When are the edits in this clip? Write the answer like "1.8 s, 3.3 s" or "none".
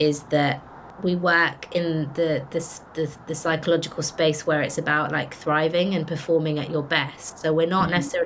none